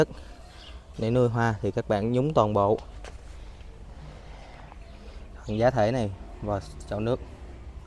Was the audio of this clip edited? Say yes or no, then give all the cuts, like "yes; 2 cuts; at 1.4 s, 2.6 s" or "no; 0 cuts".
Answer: no; 0 cuts